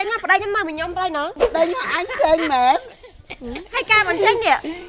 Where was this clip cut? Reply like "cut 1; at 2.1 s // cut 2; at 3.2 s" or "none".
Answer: cut 1; at 1.4 s